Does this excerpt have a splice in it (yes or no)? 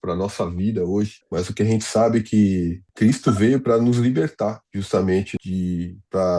yes